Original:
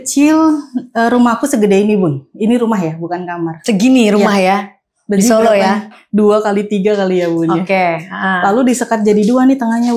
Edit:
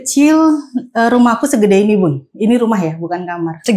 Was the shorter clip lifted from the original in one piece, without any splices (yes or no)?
yes